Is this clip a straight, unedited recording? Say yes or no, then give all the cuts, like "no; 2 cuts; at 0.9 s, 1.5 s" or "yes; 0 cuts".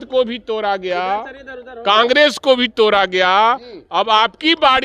yes; 0 cuts